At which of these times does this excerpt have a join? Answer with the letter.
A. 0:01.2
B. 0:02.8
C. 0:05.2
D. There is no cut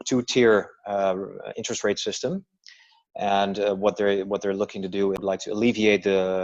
C